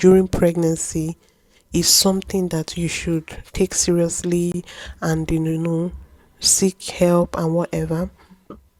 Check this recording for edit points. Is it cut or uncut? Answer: uncut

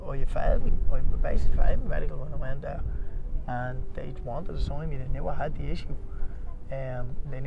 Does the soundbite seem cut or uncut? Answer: uncut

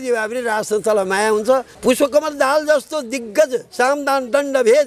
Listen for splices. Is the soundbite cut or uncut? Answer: cut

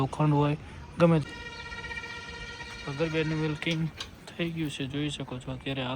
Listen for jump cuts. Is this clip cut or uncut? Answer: cut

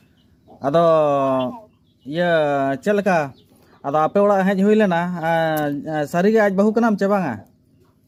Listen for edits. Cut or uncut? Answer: uncut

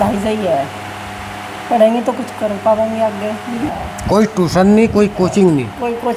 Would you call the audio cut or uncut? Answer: cut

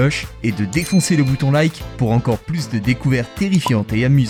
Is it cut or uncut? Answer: uncut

